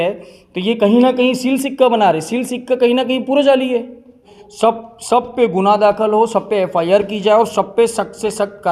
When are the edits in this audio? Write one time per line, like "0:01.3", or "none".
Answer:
0:04.4